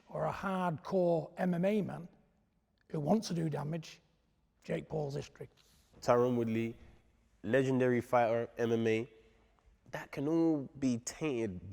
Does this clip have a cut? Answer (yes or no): yes